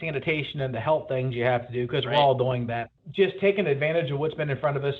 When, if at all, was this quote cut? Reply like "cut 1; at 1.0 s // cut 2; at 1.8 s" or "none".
cut 1; at 3.0 s